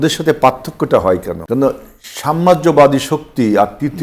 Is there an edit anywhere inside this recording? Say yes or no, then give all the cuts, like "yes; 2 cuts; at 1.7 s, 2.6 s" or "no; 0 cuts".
yes; 1 cut; at 1.3 s